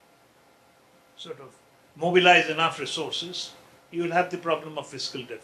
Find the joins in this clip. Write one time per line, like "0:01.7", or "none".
none